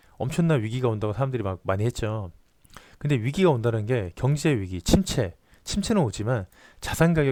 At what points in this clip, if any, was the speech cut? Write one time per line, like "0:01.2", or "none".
none